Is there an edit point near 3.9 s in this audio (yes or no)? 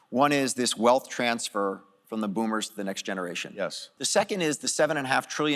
yes